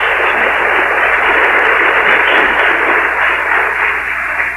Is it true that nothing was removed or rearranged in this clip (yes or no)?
yes